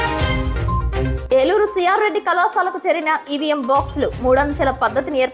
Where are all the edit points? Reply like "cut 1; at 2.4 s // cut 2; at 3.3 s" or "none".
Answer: cut 1; at 1.2 s

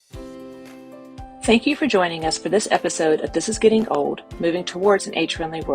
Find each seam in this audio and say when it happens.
cut 1; at 1.5 s

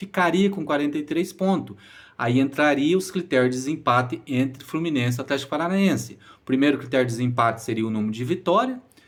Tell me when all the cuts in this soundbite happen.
none

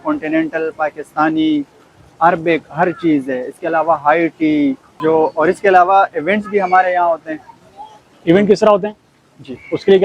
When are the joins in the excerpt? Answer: none

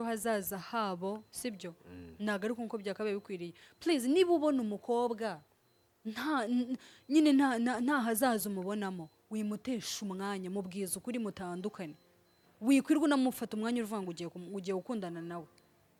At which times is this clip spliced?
none

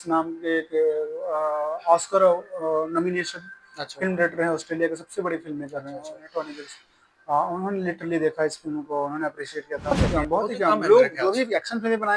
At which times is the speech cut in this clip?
cut 1; at 9.9 s

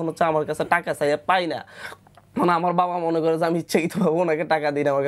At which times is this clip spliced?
none

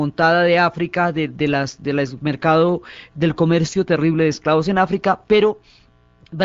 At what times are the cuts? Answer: cut 1; at 3.9 s

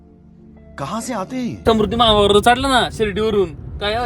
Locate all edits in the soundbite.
cut 1; at 1.6 s

